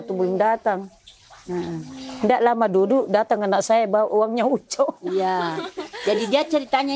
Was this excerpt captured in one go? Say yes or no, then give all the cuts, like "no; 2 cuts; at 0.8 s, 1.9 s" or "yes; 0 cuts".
yes; 0 cuts